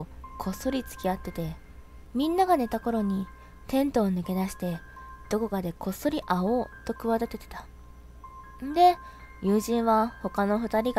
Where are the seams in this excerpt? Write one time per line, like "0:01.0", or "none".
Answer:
0:00.9